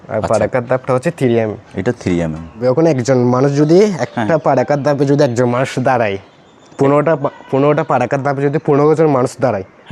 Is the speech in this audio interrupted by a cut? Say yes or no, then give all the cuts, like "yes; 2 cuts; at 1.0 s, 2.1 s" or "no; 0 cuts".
yes; 1 cut; at 2.6 s